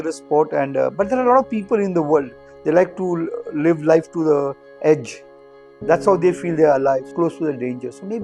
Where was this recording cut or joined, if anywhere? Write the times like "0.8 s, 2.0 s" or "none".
7.1 s